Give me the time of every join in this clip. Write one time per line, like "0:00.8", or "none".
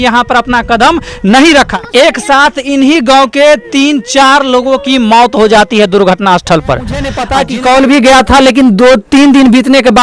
0:01.8
0:07.2